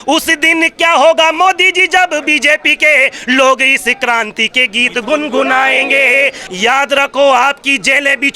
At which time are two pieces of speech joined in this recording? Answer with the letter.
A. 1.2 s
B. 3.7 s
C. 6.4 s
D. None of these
C